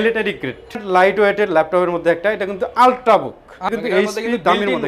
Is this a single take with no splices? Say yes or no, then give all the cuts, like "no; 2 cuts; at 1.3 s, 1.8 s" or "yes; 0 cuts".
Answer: no; 2 cuts; at 0.8 s, 3.6 s